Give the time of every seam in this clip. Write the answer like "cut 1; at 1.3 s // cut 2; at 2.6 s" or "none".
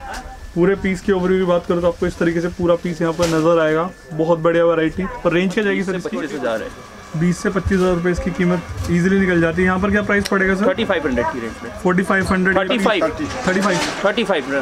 cut 1; at 6.1 s